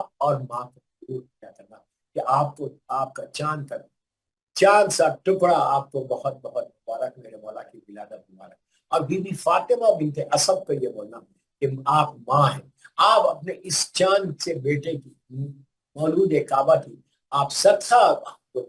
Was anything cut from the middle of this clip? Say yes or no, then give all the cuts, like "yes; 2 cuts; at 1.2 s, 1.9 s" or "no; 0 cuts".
no; 0 cuts